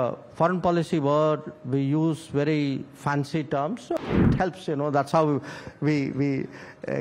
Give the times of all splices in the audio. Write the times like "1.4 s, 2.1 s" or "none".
4.1 s